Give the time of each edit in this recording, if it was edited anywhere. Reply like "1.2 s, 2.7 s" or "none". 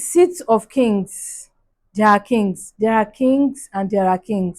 2.6 s